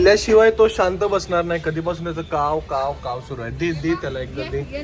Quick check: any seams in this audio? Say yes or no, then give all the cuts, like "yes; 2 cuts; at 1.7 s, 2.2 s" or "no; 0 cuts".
no; 0 cuts